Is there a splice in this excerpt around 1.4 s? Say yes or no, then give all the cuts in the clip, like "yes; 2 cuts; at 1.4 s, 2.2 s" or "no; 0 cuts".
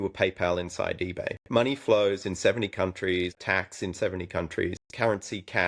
yes; 3 cuts; at 1.4 s, 3.4 s, 4.8 s